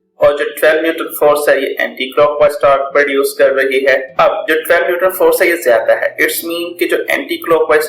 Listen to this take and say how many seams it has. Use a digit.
1